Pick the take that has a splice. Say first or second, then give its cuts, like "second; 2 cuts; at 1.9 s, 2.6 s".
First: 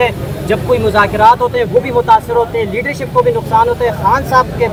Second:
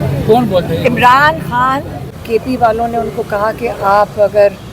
second; 1 cut; at 2.2 s